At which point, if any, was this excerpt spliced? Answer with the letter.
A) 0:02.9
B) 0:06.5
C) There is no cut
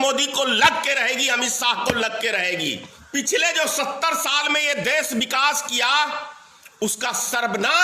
A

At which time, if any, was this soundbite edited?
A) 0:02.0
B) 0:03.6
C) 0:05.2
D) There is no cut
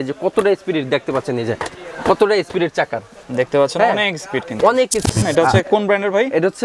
C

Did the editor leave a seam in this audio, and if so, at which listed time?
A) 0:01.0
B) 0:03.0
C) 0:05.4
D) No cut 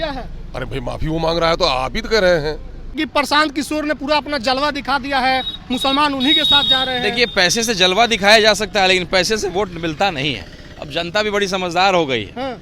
B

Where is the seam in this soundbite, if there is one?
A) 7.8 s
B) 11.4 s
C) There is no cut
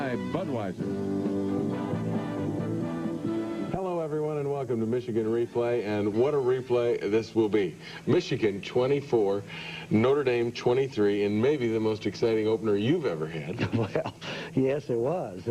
A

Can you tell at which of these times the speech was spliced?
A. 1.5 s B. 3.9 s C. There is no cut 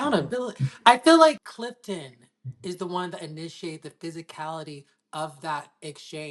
A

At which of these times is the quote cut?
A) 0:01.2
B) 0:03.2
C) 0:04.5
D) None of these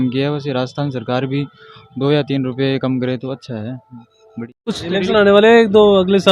C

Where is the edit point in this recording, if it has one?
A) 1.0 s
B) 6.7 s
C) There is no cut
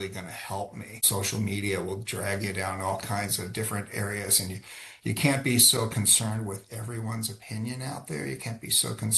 A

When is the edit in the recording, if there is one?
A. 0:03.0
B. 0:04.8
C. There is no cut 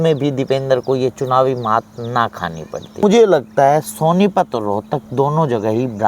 A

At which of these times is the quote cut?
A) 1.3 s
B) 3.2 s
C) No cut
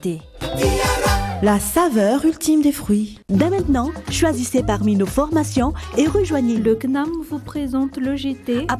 B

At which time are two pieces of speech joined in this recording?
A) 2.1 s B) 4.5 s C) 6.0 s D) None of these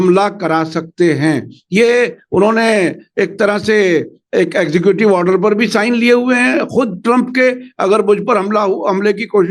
D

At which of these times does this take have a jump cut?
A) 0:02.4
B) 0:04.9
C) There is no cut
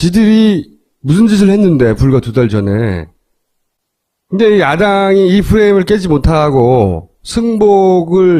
A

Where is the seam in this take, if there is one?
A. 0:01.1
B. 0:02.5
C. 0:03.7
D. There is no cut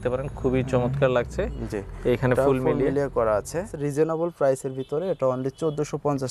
C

